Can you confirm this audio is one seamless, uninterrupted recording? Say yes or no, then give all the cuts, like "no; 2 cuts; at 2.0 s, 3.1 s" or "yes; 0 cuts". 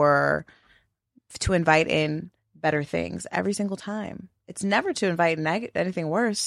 yes; 0 cuts